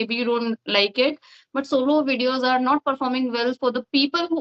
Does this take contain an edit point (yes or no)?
no